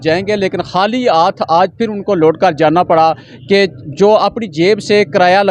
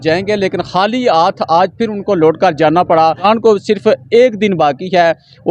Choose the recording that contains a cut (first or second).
second